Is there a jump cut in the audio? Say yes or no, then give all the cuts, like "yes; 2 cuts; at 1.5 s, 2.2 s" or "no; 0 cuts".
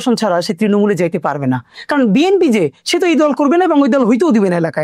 no; 0 cuts